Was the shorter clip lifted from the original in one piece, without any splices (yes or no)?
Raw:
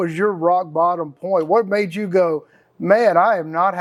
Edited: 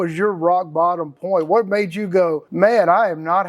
no